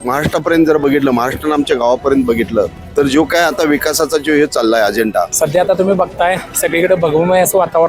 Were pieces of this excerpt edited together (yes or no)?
yes